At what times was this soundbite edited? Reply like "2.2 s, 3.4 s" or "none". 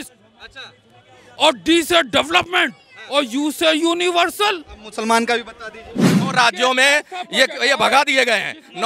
6.2 s